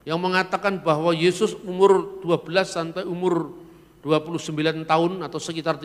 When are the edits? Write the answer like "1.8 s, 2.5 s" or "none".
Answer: none